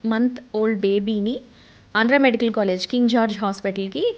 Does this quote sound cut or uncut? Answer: uncut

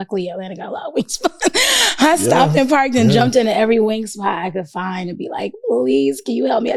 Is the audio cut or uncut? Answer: uncut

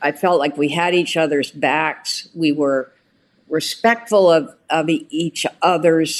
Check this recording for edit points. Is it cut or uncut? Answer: uncut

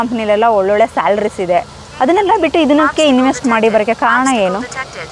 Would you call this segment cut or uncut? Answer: uncut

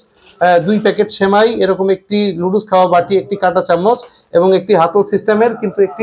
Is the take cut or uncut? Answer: uncut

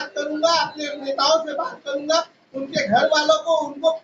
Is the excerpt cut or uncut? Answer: uncut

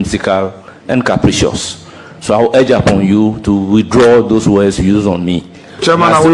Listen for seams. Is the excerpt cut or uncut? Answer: uncut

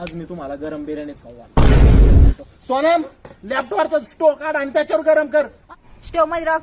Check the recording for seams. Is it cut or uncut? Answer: cut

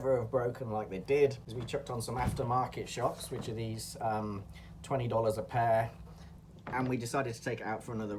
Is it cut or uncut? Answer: cut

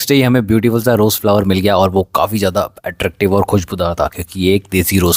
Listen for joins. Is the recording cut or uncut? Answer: uncut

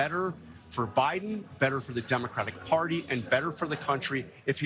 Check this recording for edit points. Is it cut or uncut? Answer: uncut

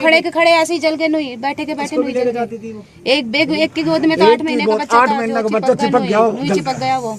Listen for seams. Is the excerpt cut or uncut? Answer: uncut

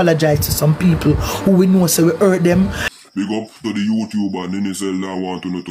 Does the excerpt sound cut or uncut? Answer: cut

